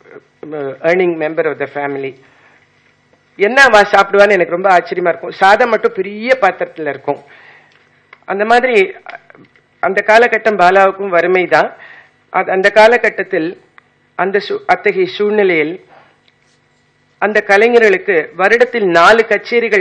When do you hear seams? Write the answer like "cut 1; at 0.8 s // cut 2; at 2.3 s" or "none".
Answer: cut 1; at 14.1 s